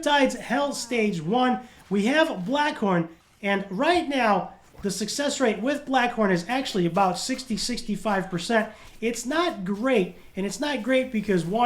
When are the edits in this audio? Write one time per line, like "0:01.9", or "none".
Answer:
0:03.2

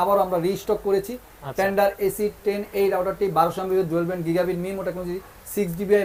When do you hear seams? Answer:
none

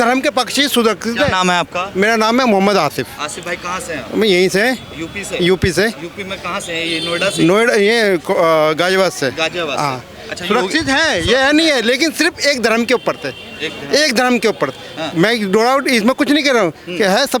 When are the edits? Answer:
none

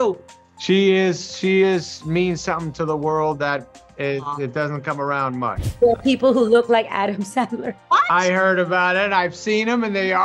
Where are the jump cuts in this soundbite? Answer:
0:05.6

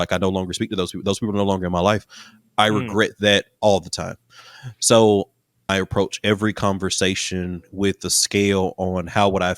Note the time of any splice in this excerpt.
0:05.7

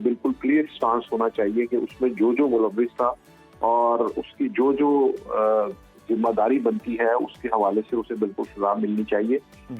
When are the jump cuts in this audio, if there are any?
none

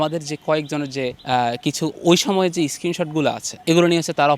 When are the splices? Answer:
0:01.2
0:03.5

